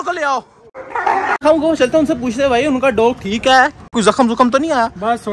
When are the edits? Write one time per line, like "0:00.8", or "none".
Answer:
0:01.4

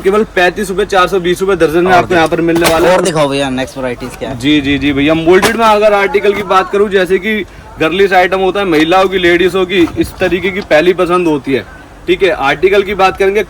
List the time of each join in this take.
none

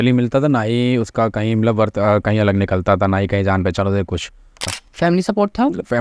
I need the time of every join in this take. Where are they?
0:04.8

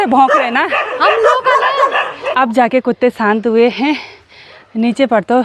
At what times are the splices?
none

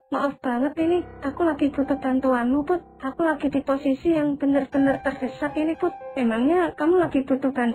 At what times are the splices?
none

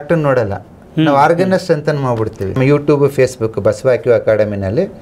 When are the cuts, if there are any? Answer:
0:02.6

